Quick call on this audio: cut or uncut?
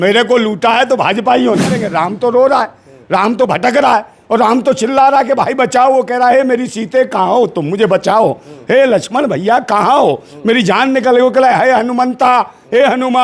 cut